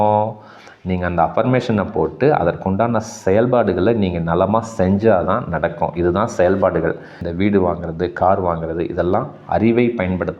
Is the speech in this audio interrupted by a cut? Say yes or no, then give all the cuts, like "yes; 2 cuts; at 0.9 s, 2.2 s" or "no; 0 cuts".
yes; 1 cut; at 7.2 s